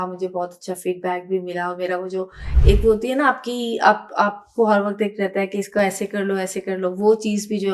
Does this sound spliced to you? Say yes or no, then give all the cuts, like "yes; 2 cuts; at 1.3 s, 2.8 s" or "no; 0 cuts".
no; 0 cuts